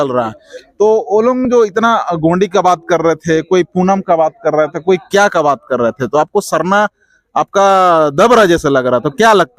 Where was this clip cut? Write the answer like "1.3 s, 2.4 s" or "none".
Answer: none